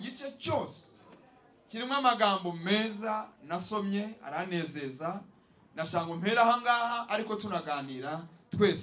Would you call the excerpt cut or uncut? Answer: uncut